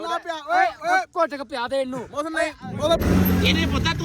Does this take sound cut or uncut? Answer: cut